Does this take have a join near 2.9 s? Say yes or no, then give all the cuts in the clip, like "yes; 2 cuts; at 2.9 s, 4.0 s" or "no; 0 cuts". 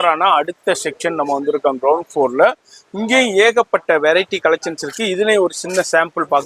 no; 0 cuts